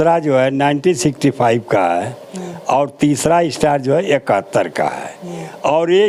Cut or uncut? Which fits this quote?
uncut